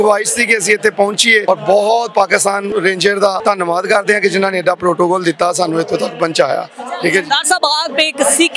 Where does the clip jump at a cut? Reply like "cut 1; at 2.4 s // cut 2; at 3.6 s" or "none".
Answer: cut 1; at 1.4 s // cut 2; at 2.7 s // cut 3; at 3.4 s